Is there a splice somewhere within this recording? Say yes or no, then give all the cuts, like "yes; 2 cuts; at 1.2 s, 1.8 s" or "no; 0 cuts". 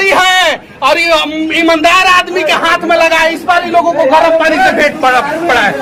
no; 0 cuts